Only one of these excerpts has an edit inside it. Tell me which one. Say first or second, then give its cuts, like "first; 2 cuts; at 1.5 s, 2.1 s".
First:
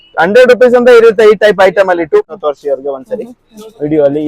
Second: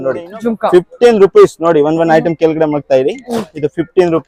first; 1 cut; at 2.3 s